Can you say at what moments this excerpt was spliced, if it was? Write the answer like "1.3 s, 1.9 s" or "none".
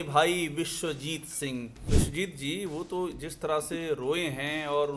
1.8 s